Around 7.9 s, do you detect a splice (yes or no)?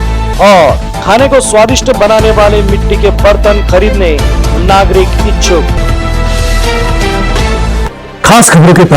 yes